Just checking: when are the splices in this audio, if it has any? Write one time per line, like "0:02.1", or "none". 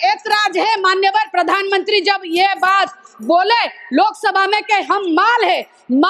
none